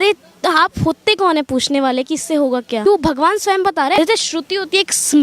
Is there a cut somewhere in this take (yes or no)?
yes